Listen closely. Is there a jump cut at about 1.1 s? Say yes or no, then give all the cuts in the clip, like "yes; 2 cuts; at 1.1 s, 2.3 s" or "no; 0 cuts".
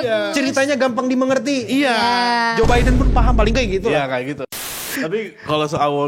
no; 1 cut; at 4.7 s